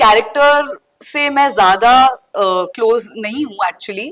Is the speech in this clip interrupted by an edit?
no; 0 cuts

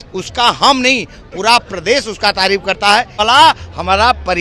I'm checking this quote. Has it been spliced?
yes; 1 cut; at 3.2 s

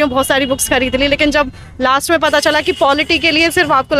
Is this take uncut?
yes; 0 cuts

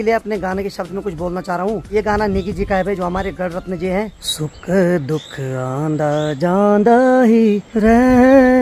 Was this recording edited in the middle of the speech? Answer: no; 0 cuts

